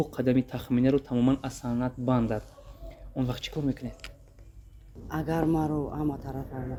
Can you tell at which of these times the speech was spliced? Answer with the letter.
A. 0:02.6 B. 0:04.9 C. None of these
C